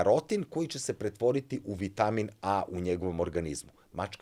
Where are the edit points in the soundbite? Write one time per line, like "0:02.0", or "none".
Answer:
none